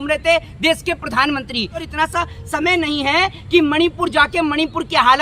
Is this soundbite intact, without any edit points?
no; 1 cut; at 1.9 s

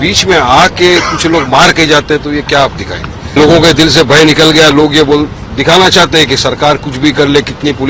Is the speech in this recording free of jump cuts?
no; 1 cut; at 3.4 s

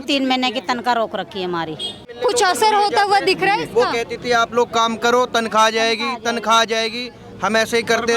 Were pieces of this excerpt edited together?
no; 0 cuts

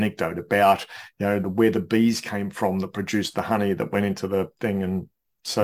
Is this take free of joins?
yes; 0 cuts

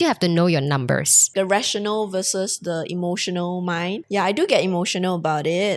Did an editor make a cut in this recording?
yes; 2 cuts; at 1.3 s, 4.0 s

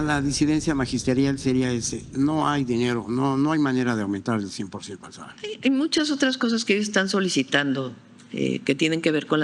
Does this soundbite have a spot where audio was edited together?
no; 0 cuts

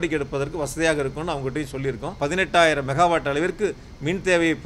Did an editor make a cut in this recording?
yes; 1 cut; at 2.2 s

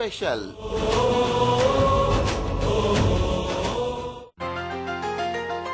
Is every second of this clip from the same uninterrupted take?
no; 1 cut; at 4.2 s

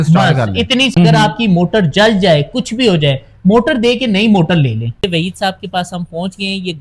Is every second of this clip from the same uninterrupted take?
no; 2 cuts; at 0.9 s, 5.1 s

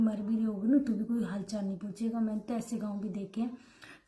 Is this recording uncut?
yes; 0 cuts

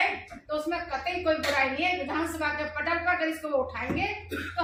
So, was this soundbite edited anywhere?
no; 0 cuts

